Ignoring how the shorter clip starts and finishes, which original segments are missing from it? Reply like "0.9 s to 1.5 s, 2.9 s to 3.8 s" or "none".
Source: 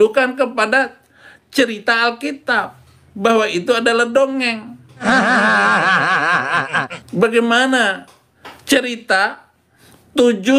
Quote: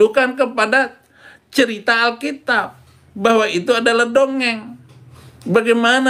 5.0 s to 6.6 s